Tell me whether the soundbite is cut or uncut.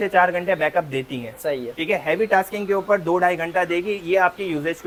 uncut